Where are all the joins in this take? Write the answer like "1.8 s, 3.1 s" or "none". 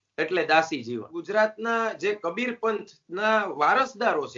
1.2 s